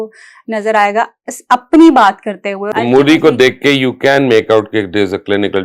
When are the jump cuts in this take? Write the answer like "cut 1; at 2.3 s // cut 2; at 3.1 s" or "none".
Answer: cut 1; at 2.7 s